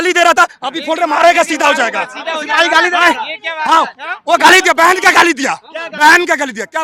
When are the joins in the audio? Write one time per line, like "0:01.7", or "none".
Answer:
none